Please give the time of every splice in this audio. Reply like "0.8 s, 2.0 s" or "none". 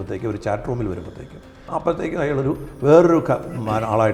1.7 s